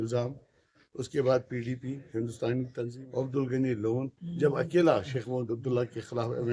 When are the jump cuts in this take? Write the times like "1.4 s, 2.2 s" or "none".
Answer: 3.0 s